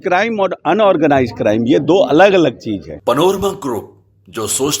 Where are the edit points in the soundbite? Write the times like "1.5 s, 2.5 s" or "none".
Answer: 2.9 s